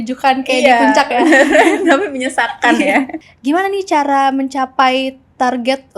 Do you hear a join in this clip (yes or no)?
yes